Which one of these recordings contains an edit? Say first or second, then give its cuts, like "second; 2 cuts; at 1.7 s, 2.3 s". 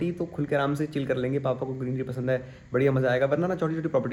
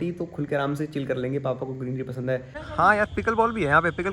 second; 1 cut; at 2.6 s